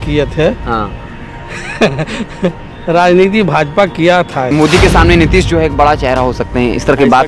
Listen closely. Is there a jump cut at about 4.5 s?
yes; 1 cut; at 4.5 s

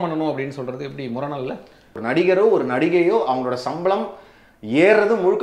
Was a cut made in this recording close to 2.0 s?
yes; 1 cut; at 2.0 s

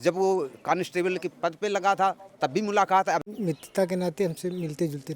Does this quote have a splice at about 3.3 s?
yes; 1 cut; at 3.3 s

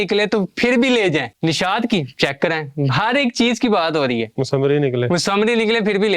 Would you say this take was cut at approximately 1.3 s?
yes; 2 cuts; at 1.3 s, 4.3 s

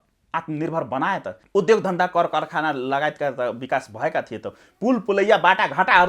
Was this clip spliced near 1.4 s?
yes; 1 cut; at 1.4 s

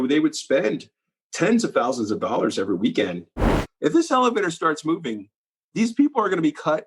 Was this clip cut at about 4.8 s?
no; 1 cut; at 3.5 s

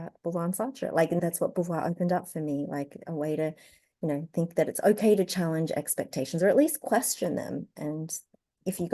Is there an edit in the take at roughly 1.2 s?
yes; 1 cut; at 1.2 s

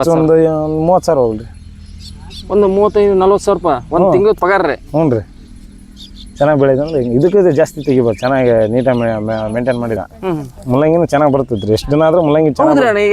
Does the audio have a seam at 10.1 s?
yes; 1 cut; at 10.1 s

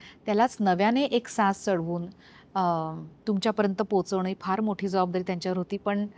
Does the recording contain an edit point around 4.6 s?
no; 0 cuts

